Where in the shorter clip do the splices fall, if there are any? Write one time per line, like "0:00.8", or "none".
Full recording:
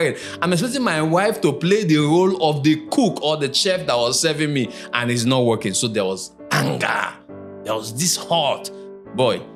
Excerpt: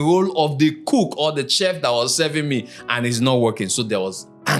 none